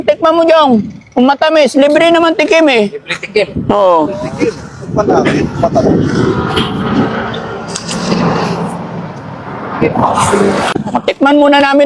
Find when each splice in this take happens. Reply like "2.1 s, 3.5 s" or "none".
10.7 s